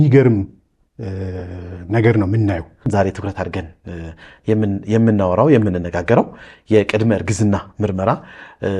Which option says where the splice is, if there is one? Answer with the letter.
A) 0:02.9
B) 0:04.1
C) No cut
A